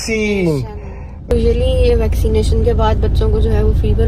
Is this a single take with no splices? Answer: no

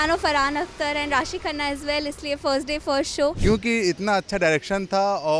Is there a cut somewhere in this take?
yes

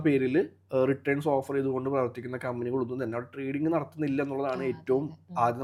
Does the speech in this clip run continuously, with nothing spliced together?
yes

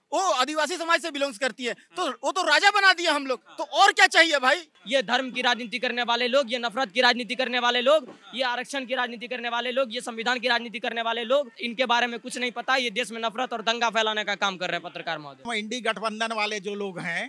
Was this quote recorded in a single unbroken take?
no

